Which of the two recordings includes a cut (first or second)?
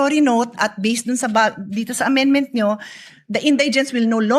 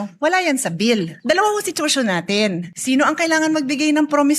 second